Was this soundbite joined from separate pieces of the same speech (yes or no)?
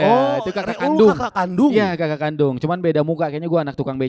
no